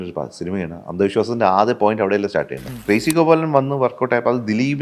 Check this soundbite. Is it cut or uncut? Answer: cut